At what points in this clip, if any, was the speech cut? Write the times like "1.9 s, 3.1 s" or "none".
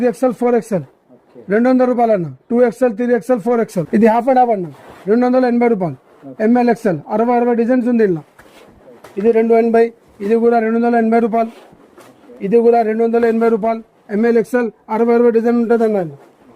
none